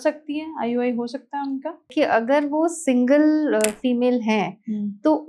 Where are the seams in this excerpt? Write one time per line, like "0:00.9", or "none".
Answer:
0:01.9